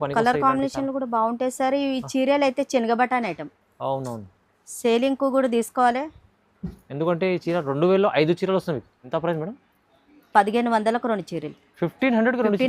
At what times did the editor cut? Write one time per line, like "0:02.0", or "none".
0:08.9